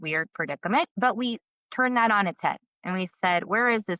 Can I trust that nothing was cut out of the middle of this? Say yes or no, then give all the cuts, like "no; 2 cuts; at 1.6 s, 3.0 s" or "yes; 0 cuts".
no; 1 cut; at 0.9 s